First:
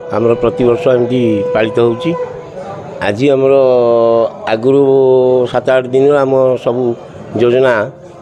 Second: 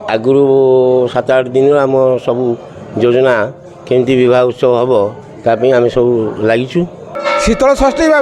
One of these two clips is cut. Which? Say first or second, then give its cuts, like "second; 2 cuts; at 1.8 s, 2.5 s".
second; 1 cut; at 7.1 s